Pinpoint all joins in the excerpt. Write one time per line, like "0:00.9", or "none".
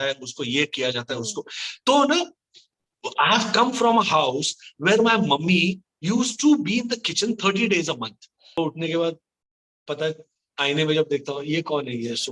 0:08.4